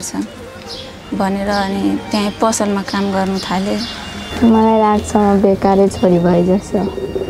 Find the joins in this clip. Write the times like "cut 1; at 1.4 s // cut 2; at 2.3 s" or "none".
cut 1; at 4.2 s